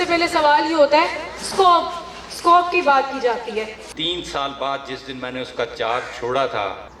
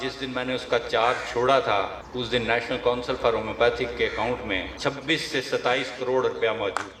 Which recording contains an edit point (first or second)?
first